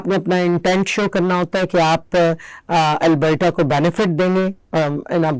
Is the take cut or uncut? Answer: uncut